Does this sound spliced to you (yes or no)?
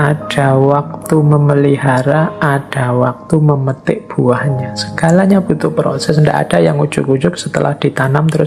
no